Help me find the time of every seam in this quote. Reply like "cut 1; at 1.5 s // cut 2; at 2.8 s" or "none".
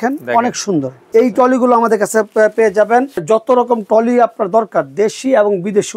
cut 1; at 1.0 s // cut 2; at 3.2 s